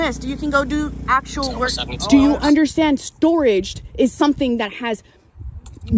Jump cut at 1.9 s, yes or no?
yes